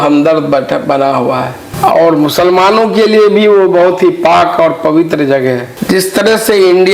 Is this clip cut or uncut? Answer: cut